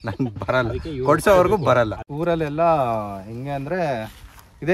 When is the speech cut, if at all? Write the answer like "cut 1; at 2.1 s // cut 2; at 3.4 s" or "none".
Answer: cut 1; at 2.0 s